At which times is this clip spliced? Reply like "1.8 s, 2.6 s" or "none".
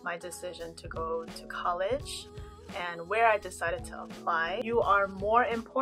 4.6 s